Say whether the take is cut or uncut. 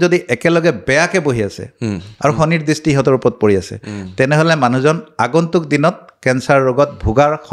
uncut